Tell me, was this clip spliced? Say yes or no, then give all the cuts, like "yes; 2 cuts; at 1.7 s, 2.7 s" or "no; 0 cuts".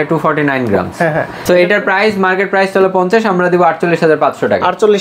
no; 0 cuts